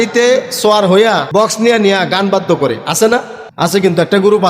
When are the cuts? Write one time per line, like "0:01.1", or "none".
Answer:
0:01.3
0:03.4